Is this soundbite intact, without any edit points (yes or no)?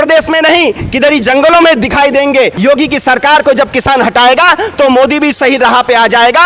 no